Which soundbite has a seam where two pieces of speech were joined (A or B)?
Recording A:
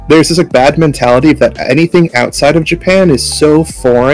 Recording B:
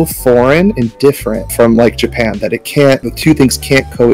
B